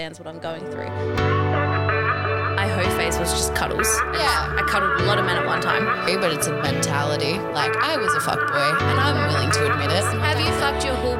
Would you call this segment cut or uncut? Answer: cut